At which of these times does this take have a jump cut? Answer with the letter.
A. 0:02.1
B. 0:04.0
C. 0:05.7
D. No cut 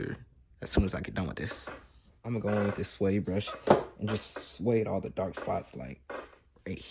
A